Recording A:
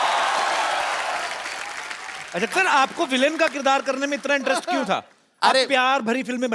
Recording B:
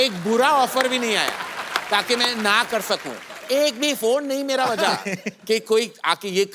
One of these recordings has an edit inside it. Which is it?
A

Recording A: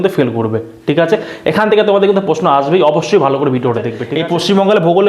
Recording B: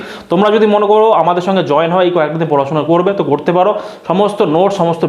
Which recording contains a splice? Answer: A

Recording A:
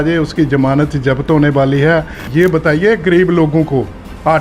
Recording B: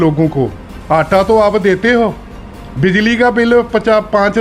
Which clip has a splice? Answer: A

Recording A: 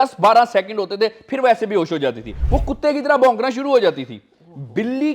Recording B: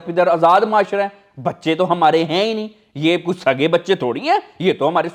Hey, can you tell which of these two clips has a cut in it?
A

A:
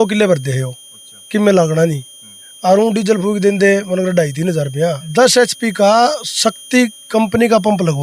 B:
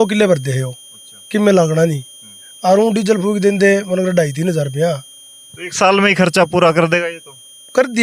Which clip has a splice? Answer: A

